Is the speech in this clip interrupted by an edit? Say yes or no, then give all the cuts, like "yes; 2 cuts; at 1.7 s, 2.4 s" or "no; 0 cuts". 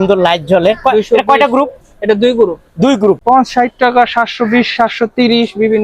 yes; 1 cut; at 3.2 s